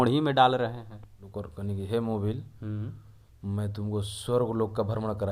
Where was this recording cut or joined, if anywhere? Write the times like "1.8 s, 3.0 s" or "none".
1.2 s